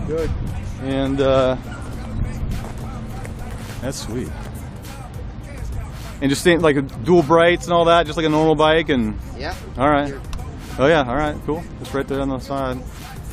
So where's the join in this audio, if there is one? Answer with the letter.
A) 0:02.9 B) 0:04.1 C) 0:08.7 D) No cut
B